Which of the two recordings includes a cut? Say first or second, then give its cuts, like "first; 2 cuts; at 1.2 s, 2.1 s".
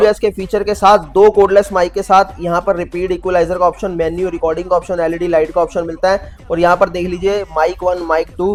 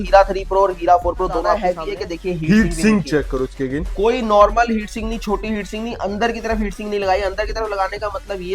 second; 1 cut; at 1.6 s